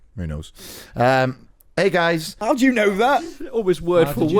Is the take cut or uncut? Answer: cut